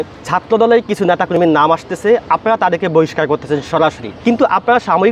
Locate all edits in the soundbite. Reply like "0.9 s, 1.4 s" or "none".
4.1 s